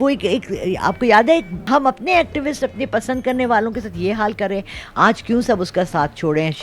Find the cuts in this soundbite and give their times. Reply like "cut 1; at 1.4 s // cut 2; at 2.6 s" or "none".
none